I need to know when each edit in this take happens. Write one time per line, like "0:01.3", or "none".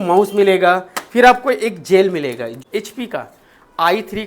0:02.5